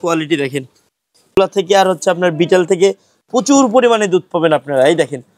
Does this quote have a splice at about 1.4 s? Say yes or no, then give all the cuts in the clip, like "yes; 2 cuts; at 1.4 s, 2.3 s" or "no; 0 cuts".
yes; 1 cut; at 1.4 s